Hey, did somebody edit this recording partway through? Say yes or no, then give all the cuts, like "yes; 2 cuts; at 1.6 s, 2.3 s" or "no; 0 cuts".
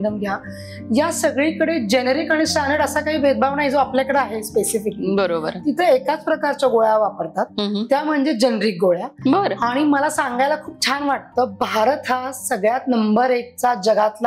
no; 0 cuts